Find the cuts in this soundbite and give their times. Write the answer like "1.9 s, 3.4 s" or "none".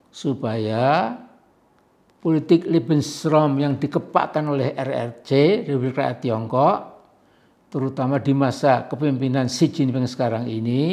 none